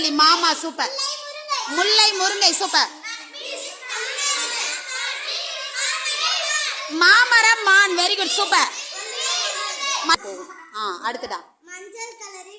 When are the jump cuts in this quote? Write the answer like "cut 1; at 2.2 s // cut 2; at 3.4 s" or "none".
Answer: cut 1; at 10.1 s